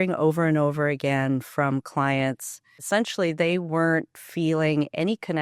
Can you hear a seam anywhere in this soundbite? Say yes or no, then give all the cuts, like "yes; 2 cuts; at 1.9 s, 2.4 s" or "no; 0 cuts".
yes; 1 cut; at 2.8 s